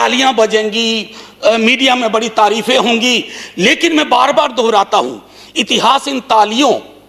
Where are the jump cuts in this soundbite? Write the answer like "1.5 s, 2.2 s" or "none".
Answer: none